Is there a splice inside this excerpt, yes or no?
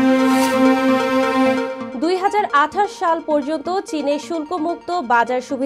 yes